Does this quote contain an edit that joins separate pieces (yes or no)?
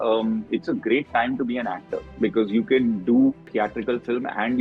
yes